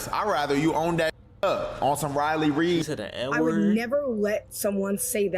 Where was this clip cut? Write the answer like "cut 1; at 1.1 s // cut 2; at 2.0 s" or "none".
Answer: cut 1; at 3.2 s